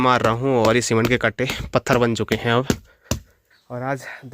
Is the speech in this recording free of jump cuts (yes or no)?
no